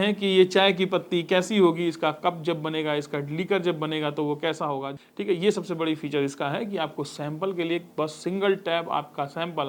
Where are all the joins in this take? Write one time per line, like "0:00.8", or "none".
0:04.9